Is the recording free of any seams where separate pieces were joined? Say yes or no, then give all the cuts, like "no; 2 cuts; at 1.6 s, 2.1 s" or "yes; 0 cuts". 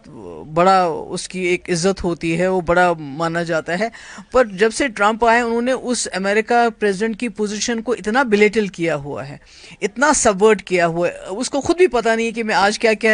yes; 0 cuts